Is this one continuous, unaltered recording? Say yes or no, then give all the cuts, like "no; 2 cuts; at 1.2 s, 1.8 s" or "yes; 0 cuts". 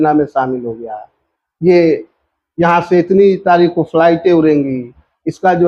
yes; 0 cuts